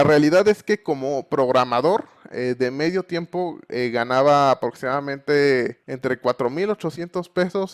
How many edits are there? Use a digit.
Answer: 1